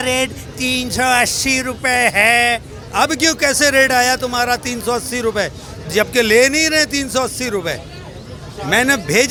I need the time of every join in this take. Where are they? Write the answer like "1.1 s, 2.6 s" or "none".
none